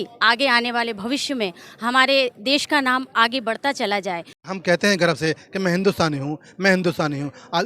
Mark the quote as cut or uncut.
cut